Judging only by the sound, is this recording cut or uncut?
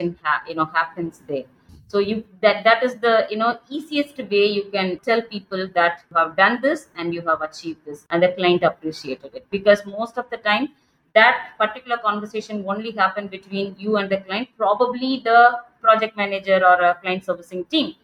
cut